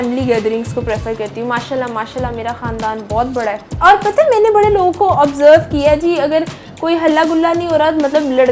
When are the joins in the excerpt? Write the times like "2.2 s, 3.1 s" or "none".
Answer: 3.7 s